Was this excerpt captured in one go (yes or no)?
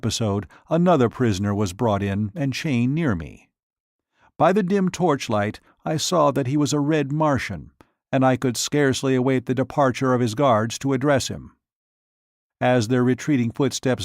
no